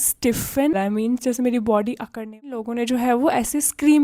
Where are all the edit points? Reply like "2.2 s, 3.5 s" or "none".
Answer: 0.7 s, 2.6 s